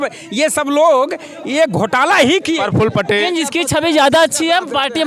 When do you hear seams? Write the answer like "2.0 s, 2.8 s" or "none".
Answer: 3.3 s